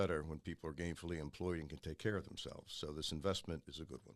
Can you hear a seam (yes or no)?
no